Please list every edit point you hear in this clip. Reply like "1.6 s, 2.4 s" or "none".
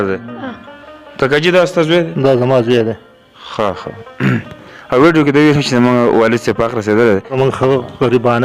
7.3 s